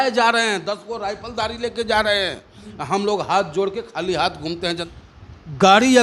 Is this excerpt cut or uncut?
cut